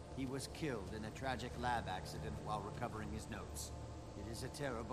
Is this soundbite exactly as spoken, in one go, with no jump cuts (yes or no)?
yes